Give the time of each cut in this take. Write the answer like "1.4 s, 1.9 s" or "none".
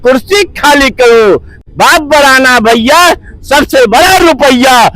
1.6 s

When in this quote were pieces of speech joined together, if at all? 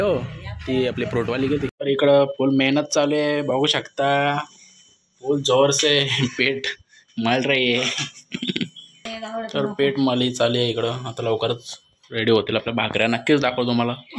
1.8 s, 9.1 s

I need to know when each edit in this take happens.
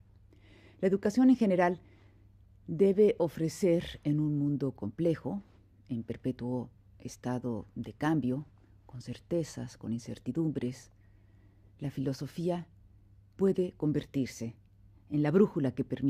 none

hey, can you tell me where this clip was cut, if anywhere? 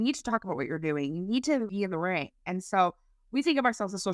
1.7 s

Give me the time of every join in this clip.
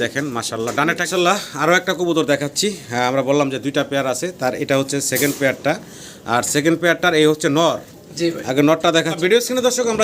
1.0 s, 9.1 s

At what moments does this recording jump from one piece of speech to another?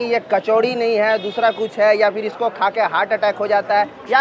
none

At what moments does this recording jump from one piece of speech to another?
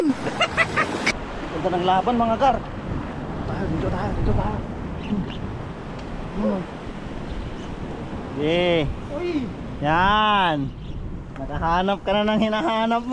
1.1 s

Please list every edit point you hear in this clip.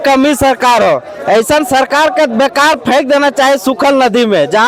none

